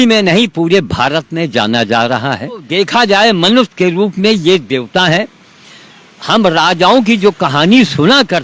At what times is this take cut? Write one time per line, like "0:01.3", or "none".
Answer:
0:02.7